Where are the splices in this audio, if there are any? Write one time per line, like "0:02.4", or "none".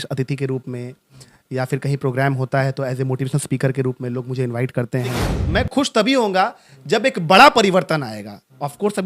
0:05.3